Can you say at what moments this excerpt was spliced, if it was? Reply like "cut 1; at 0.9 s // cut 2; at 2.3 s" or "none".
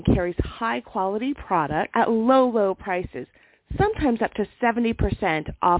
cut 1; at 1.9 s